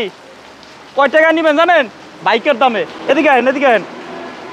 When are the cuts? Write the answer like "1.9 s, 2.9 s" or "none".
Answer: none